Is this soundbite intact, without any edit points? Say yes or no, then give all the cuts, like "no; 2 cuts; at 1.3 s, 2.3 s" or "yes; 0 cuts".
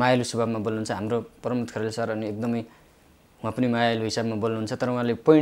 yes; 0 cuts